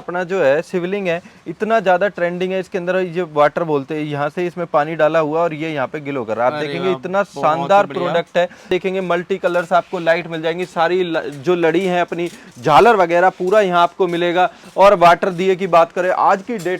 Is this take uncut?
no; 1 cut; at 8.7 s

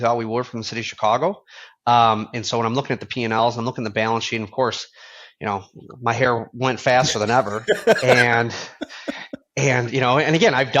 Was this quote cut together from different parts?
no; 0 cuts

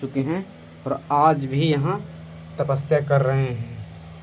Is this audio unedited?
yes; 0 cuts

